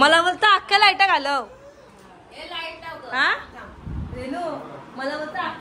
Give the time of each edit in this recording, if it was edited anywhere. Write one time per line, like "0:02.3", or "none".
none